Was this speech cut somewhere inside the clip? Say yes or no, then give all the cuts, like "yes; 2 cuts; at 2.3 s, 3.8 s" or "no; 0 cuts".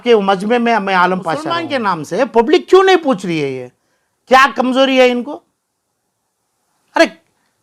yes; 1 cut; at 1.6 s